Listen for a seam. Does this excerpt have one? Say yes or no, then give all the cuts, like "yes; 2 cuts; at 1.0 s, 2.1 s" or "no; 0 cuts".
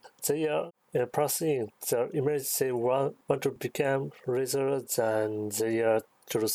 no; 0 cuts